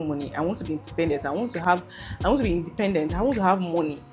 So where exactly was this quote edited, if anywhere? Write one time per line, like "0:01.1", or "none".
none

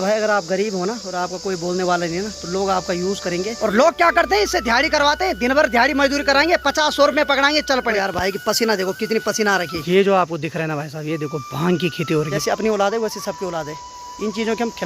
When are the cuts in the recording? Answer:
0:03.5
0:07.9
0:09.8
0:12.3

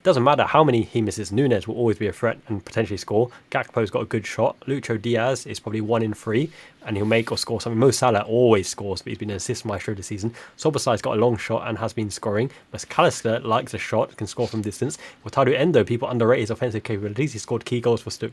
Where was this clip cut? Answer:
none

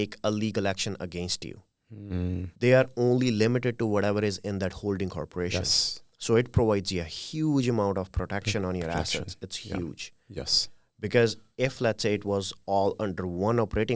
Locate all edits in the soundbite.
0:02.5

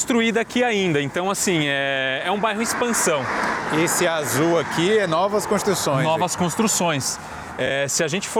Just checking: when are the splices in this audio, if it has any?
none

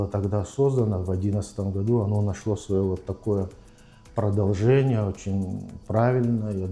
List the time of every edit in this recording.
none

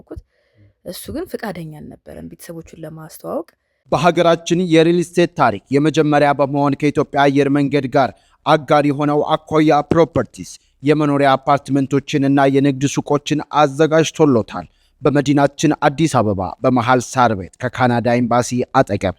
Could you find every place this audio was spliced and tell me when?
0:03.7

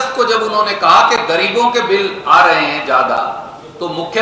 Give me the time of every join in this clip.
none

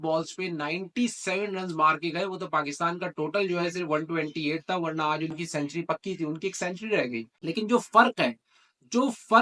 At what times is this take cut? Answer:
0:07.3

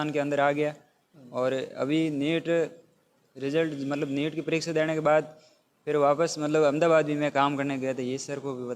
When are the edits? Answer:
none

